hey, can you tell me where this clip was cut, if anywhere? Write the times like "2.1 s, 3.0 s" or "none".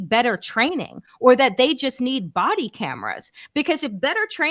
none

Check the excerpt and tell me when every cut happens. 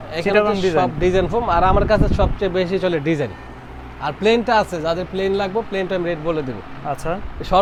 none

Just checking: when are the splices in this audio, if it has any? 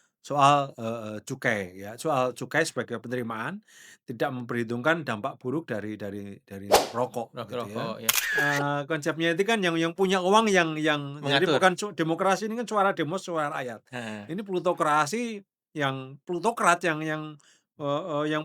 8.3 s

